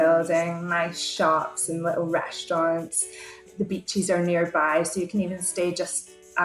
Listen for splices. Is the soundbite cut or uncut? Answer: cut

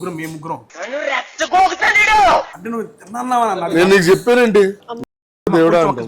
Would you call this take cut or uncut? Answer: cut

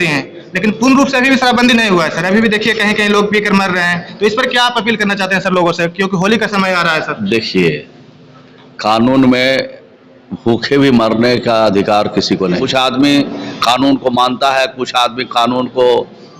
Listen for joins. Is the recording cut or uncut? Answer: cut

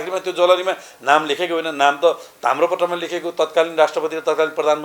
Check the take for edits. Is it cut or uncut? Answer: uncut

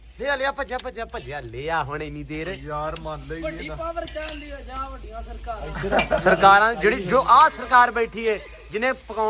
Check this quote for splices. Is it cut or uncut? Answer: uncut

